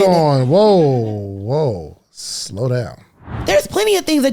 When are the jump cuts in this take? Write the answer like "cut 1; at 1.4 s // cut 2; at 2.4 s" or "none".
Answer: cut 1; at 3.3 s